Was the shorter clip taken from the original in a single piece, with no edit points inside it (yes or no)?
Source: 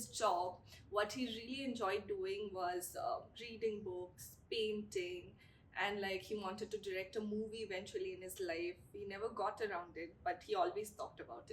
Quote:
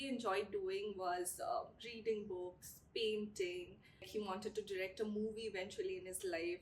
no